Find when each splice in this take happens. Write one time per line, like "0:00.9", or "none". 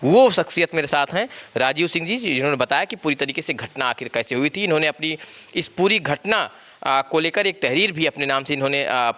none